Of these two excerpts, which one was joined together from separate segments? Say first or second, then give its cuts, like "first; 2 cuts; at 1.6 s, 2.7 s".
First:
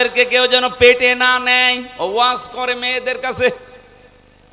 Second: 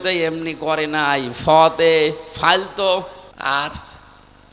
second; 1 cut; at 3.2 s